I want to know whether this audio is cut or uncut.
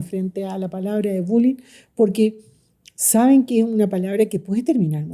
uncut